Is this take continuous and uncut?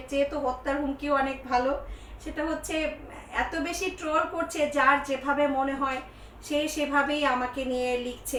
yes; 0 cuts

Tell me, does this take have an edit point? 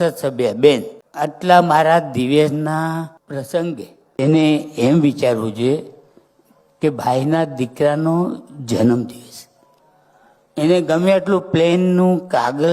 yes; 2 cuts; at 1.0 s, 3.2 s

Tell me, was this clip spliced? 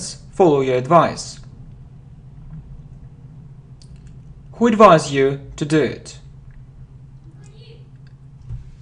yes; 1 cut; at 4.7 s

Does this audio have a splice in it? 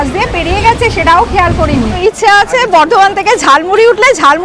yes; 1 cut; at 2.0 s

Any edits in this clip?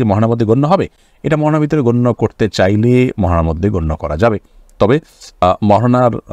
no; 0 cuts

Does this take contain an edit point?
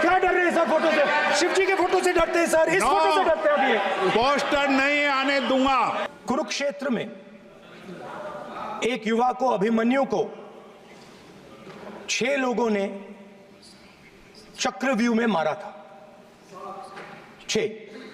yes; 1 cut; at 6.1 s

